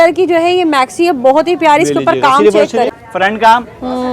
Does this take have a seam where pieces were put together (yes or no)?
yes